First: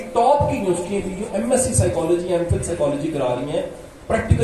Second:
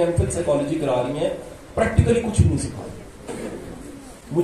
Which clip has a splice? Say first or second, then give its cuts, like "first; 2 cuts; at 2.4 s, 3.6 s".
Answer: second; 1 cut; at 3.1 s